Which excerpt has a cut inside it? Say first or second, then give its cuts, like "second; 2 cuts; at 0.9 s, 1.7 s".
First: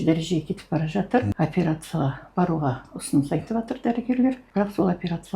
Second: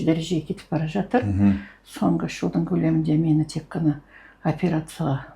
first; 2 cuts; at 1.3 s, 4.4 s